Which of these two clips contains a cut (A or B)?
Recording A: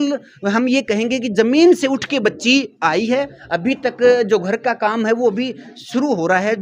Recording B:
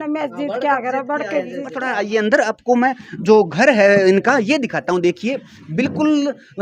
B